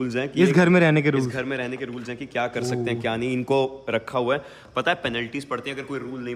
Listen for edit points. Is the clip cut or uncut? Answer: uncut